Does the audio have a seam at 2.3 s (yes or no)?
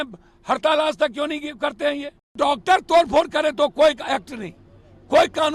yes